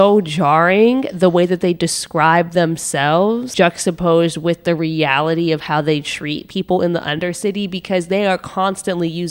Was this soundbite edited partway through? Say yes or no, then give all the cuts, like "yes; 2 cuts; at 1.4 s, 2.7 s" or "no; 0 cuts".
yes; 1 cut; at 3.5 s